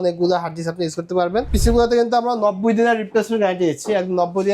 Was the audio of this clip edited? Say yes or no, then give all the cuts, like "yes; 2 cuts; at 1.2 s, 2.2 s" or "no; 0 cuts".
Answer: yes; 1 cut; at 1.5 s